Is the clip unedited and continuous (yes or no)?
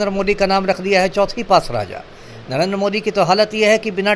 yes